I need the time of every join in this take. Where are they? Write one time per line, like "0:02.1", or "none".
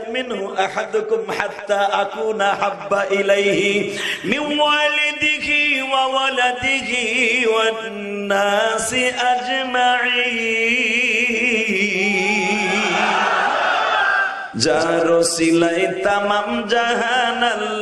0:14.4